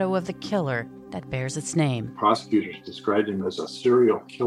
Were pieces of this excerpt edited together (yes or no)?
yes